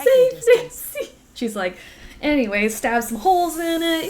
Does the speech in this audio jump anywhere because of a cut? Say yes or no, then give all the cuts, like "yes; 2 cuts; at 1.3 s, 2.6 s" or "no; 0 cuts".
yes; 1 cut; at 1.2 s